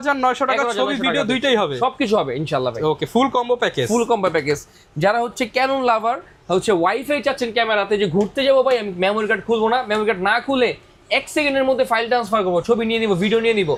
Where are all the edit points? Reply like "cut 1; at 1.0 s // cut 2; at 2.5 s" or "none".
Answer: none